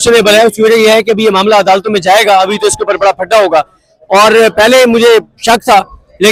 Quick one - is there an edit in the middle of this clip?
no; 0 cuts

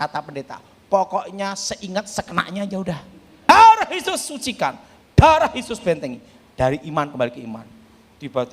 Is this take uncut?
no; 1 cut; at 3.5 s

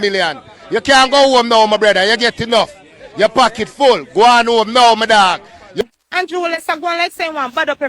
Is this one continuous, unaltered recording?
no; 1 cut; at 5.8 s

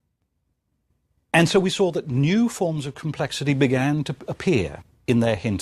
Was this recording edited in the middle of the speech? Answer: no; 0 cuts

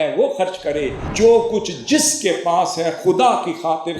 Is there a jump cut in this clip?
yes; 1 cut; at 1.0 s

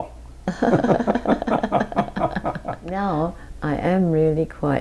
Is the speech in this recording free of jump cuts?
no; 1 cut; at 2.9 s

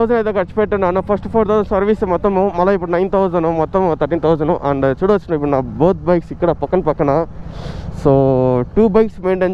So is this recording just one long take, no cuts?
yes; 0 cuts

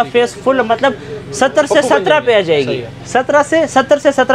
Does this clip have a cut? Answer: no; 0 cuts

